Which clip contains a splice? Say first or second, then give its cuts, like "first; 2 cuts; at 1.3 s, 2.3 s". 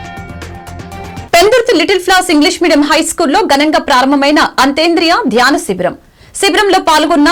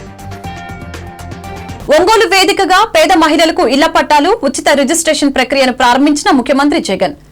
second; 1 cut; at 1.8 s